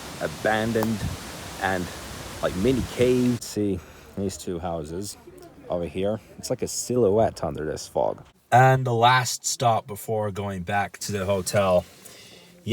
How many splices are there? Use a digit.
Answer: 2